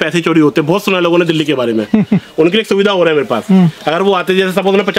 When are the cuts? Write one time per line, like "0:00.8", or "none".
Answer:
none